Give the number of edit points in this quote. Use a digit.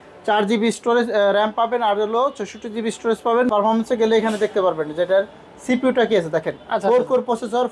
1